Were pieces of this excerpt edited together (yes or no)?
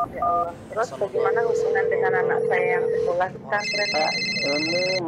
no